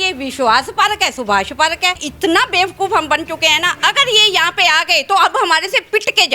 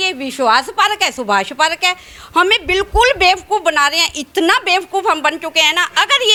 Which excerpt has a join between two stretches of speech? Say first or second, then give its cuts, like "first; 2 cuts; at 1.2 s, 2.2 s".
first; 1 cut; at 2.0 s